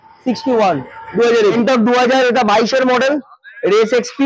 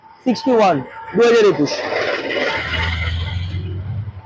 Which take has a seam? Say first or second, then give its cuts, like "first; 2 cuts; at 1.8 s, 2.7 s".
first; 1 cut; at 1.5 s